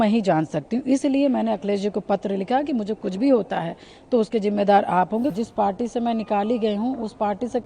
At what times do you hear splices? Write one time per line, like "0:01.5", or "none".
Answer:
0:05.3